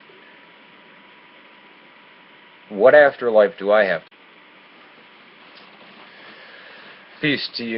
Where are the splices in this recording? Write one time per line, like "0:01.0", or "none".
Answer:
none